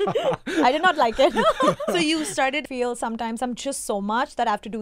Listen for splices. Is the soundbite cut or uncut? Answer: cut